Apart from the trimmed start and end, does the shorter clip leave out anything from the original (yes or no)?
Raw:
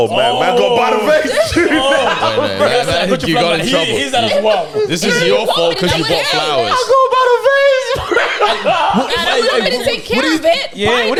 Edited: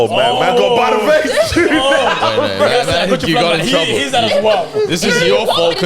no